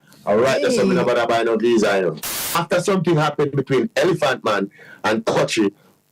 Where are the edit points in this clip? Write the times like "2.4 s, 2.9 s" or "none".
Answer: 2.2 s